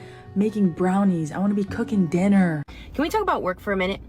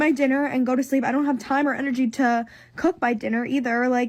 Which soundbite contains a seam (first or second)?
first